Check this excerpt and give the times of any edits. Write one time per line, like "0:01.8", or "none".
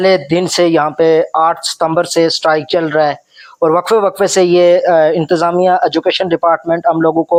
none